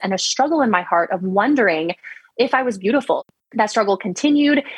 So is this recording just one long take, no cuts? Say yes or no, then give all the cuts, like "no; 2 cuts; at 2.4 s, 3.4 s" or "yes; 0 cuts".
no; 1 cut; at 3.2 s